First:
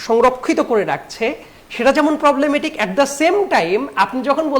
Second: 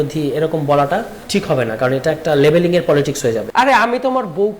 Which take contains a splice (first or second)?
second